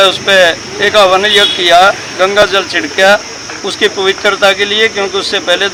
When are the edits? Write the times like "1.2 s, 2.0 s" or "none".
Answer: none